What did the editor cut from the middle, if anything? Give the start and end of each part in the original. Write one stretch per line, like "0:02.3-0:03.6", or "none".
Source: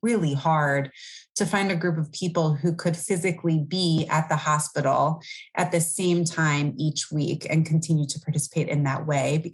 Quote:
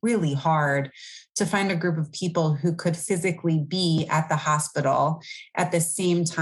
none